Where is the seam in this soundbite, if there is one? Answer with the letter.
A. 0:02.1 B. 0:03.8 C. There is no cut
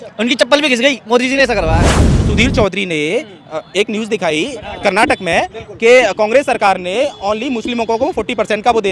A